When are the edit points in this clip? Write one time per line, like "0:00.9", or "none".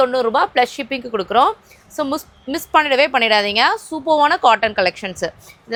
none